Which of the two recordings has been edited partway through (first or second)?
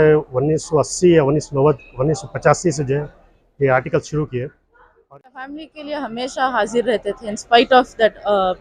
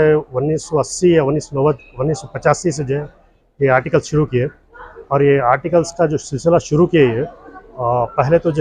first